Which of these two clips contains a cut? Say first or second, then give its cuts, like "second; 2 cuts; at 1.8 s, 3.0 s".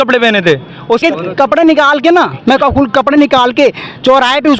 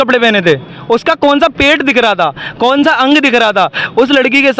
first; 1 cut; at 1.0 s